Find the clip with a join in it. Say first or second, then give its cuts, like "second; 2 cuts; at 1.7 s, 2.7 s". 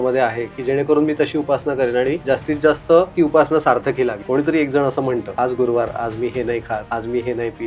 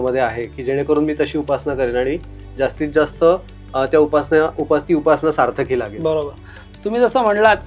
first; 5 cuts; at 2.2 s, 3.1 s, 4.2 s, 5.3 s, 6.8 s